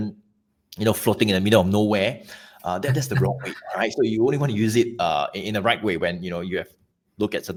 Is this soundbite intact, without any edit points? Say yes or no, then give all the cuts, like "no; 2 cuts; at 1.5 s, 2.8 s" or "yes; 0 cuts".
yes; 0 cuts